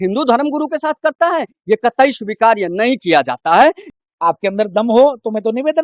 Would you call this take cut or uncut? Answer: cut